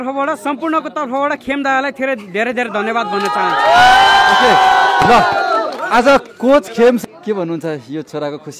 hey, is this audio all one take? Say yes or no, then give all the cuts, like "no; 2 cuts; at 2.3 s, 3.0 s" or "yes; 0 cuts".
no; 1 cut; at 7.0 s